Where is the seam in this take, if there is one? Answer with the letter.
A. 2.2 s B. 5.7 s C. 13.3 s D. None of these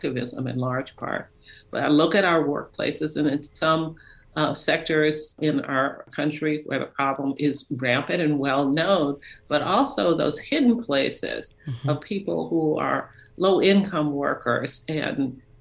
B